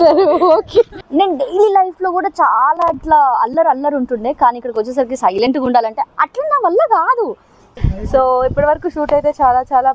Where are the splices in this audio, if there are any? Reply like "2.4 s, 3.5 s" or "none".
1.0 s, 7.6 s